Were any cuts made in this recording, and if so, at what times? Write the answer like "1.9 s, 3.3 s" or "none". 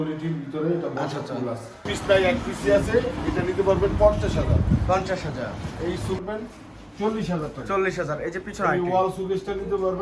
2.0 s, 6.2 s